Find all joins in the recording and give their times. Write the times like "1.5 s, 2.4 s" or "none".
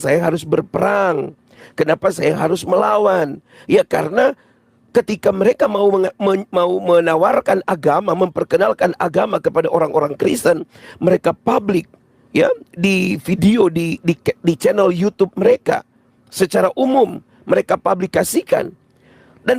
1.3 s